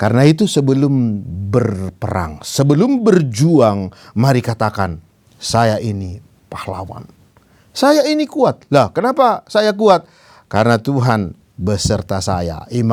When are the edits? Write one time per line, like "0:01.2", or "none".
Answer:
none

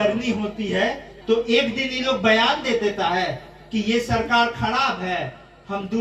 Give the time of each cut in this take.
0:01.1

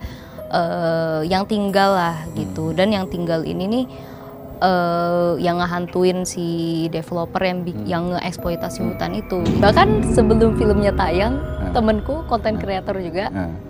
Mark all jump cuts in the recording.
0:09.5

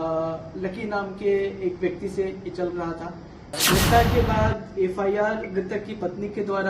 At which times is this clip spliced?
0:03.6

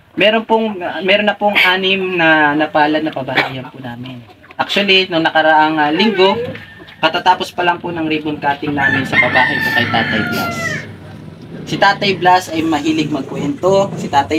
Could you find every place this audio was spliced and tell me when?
none

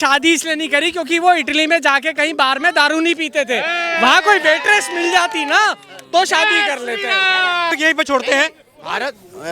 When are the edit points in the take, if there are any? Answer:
0:07.7

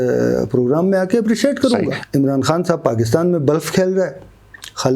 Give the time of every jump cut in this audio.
0:02.0

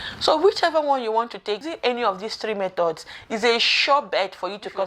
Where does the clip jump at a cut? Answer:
0:01.7

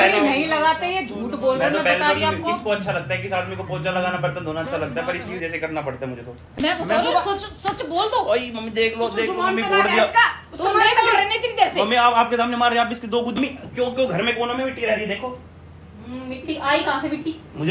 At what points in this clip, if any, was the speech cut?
0:06.5
0:13.4

